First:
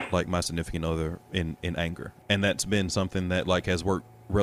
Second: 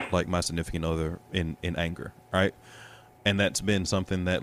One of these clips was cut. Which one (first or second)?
first